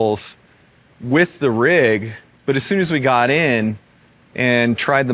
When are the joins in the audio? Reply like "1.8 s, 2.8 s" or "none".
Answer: none